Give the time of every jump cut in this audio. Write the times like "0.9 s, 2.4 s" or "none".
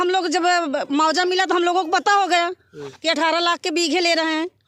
none